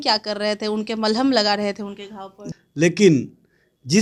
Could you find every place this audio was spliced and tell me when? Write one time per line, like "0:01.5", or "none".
0:02.4